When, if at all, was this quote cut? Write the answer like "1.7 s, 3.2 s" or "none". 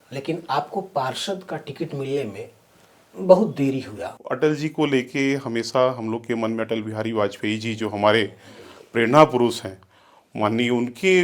4.1 s